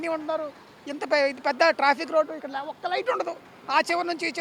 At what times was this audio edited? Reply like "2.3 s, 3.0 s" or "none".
none